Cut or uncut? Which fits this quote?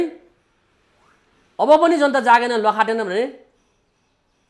uncut